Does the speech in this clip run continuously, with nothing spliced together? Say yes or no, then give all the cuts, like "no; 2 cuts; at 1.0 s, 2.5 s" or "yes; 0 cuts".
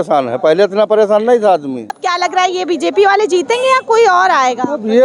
no; 1 cut; at 1.9 s